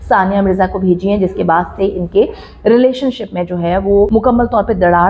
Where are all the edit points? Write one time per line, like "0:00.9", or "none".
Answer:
0:04.1